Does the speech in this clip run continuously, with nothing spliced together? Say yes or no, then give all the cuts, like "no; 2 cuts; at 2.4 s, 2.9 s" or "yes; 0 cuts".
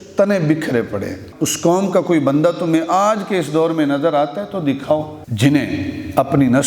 no; 2 cuts; at 1.2 s, 5.2 s